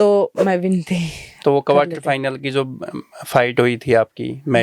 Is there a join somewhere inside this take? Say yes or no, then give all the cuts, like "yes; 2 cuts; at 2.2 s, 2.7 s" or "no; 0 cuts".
yes; 1 cut; at 1.3 s